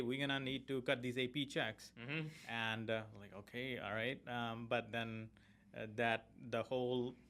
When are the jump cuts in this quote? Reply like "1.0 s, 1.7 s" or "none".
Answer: none